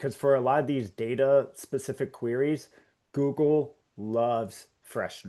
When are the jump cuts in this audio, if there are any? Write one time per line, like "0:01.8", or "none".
none